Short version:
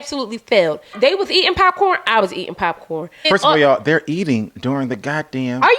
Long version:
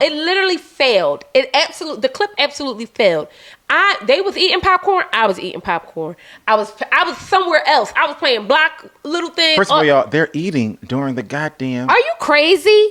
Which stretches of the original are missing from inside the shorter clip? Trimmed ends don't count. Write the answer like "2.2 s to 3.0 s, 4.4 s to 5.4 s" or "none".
3.4 s to 4.0 s, 6.3 s to 9.5 s